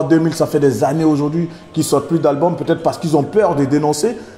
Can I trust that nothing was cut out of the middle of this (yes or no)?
yes